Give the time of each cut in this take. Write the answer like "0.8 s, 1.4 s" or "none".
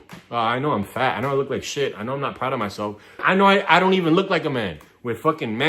3.2 s